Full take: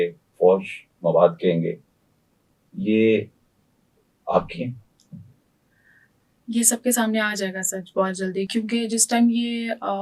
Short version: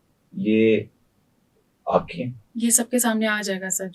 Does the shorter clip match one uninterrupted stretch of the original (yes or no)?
no